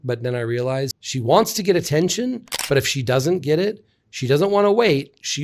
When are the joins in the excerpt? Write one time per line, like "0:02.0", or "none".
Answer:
0:01.0